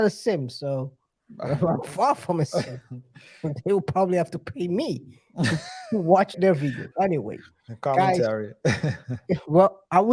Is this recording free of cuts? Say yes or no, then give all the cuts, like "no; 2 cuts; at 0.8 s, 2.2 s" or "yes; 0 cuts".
no; 1 cut; at 6.4 s